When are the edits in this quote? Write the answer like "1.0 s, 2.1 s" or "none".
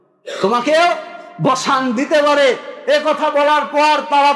none